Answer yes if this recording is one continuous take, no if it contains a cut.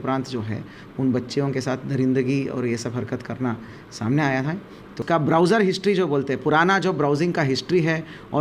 no